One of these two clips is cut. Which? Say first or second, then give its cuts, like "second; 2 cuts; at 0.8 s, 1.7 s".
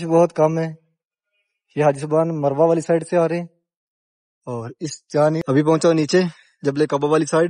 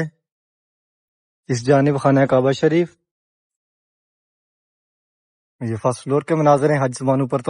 first; 1 cut; at 5.4 s